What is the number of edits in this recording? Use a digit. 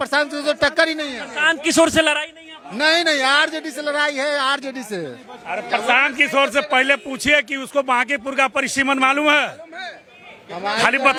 0